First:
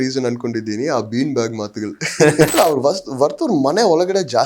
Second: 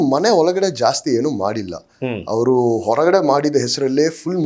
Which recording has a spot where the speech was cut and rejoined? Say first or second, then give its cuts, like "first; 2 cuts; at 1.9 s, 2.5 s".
first; 1 cut; at 2.5 s